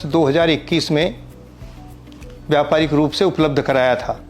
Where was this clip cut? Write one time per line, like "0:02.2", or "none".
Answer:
none